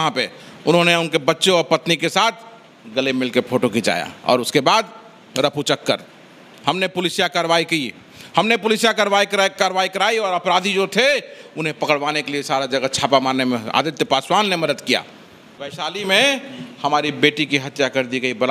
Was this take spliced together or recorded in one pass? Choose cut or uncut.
uncut